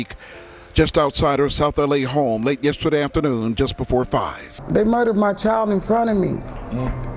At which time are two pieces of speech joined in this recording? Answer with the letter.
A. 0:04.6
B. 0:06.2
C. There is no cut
A